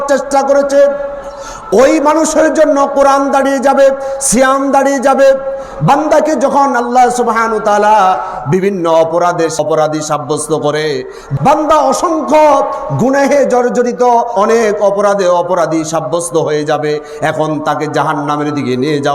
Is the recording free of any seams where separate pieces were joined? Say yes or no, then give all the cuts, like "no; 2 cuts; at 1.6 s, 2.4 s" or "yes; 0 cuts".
no; 3 cuts; at 9.6 s, 11.3 s, 14.3 s